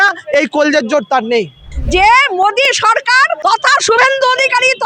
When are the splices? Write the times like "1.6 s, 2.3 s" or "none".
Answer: 1.7 s, 3.3 s